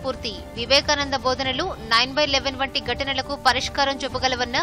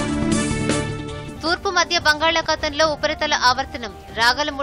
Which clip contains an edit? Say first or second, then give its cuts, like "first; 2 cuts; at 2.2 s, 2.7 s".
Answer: second; 1 cut; at 1.0 s